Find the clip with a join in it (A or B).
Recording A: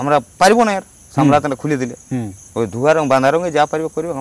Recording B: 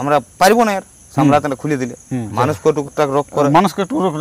B